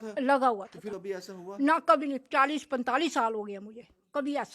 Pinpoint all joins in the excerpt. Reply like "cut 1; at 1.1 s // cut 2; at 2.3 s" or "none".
cut 1; at 0.9 s